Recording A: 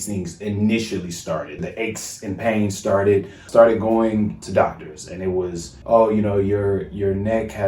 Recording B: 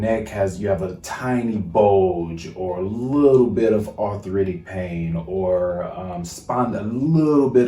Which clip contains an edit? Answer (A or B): A